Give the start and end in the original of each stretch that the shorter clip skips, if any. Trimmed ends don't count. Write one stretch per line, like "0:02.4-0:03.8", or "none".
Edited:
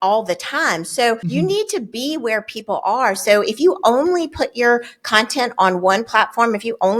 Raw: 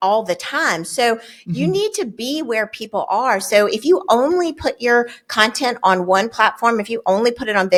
0:01.2-0:01.5